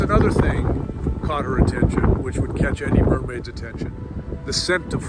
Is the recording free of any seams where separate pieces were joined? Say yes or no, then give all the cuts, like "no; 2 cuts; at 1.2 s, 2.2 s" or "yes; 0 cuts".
yes; 0 cuts